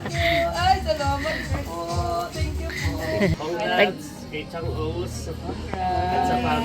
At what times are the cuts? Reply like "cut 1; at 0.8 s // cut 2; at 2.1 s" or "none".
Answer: cut 1; at 3.3 s

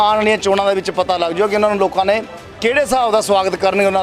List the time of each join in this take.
none

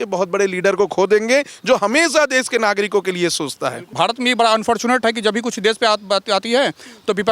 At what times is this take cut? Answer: cut 1; at 3.9 s

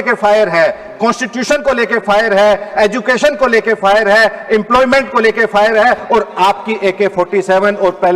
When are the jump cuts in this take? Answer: none

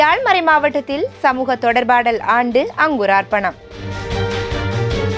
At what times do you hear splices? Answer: cut 1; at 3.8 s

